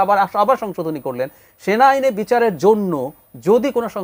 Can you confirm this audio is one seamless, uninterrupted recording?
yes; 0 cuts

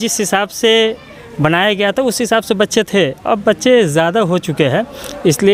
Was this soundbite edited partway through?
no; 0 cuts

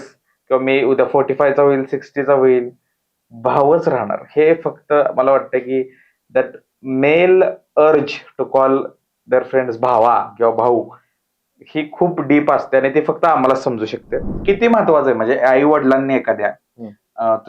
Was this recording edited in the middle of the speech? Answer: yes; 1 cut; at 14.3 s

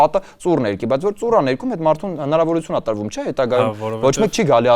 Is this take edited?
no; 0 cuts

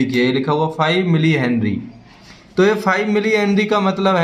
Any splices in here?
no; 0 cuts

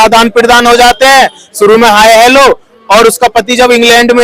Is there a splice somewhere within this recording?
no; 0 cuts

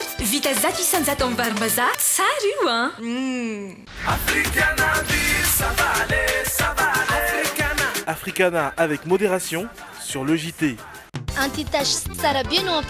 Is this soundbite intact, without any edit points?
no; 2 cuts; at 3.8 s, 11.0 s

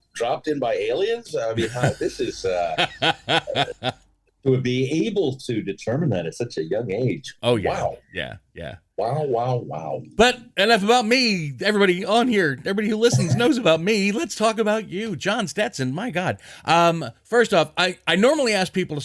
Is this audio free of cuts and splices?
yes; 0 cuts

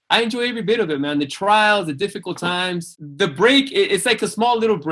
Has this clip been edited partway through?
yes; 1 cut; at 3.0 s

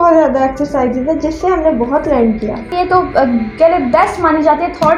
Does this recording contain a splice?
yes; 1 cut; at 2.6 s

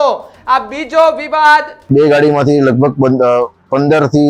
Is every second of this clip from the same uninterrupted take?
no; 1 cut; at 1.7 s

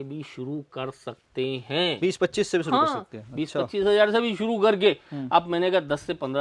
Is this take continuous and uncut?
yes; 0 cuts

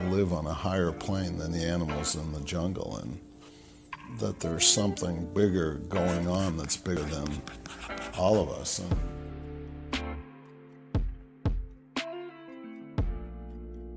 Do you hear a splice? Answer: yes; 1 cut; at 7.0 s

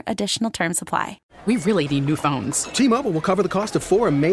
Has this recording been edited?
yes; 1 cut; at 1.2 s

